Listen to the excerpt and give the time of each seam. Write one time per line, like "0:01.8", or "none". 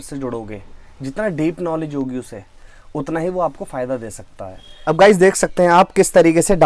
0:04.7